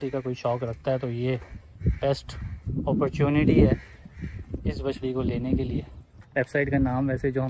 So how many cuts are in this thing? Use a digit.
1